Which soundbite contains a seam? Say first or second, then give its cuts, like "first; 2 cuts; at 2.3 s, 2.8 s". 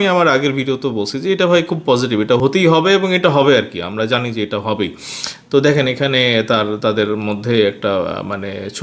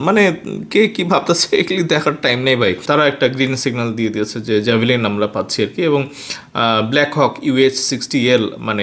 second; 1 cut; at 2.8 s